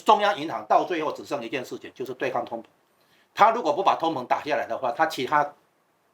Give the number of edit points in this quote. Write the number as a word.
zero